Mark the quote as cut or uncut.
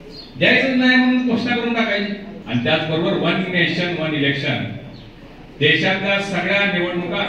cut